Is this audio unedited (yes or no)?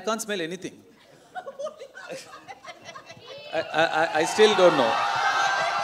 yes